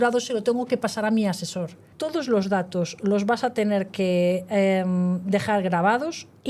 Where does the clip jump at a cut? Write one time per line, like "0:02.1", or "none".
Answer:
0:01.9